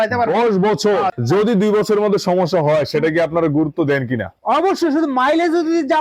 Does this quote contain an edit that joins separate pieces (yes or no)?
yes